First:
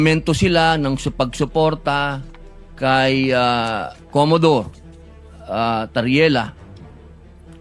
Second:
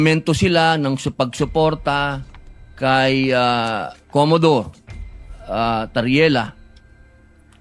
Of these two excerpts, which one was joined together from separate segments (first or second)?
first